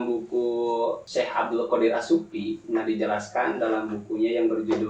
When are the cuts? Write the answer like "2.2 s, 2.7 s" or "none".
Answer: 1.0 s

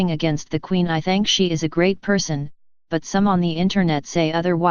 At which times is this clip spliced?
1.7 s

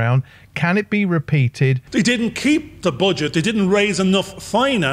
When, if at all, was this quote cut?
1.8 s

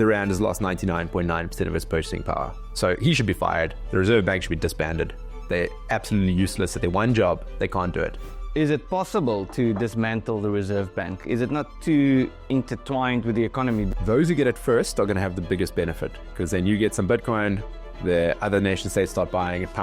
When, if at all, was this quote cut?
8.2 s, 13.9 s

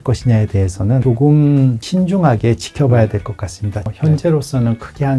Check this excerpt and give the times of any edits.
3.9 s

